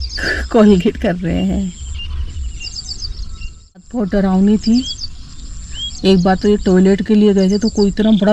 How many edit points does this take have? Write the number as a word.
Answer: one